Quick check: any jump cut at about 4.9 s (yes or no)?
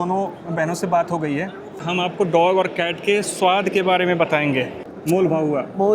yes